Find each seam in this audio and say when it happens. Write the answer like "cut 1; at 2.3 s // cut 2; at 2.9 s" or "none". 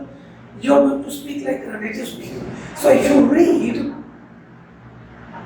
cut 1; at 2.3 s